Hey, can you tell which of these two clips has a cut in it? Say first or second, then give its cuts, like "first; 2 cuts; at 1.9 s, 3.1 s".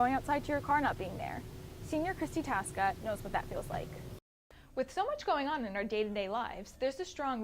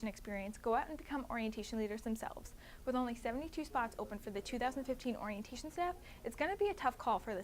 first; 1 cut; at 4.3 s